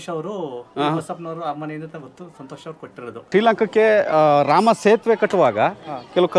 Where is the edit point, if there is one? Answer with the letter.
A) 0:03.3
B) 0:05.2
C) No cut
A